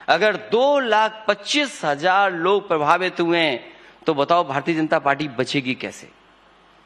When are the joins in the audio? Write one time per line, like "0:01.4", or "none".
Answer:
none